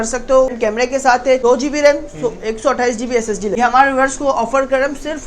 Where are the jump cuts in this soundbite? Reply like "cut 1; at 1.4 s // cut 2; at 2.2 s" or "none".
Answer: cut 1; at 1.1 s // cut 2; at 3.6 s